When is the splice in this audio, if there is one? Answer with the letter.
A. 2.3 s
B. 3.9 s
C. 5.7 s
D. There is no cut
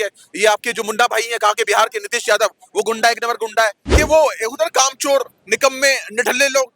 B